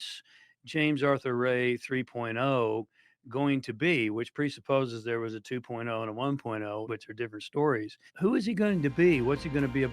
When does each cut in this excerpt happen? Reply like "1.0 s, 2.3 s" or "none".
6.8 s, 8.0 s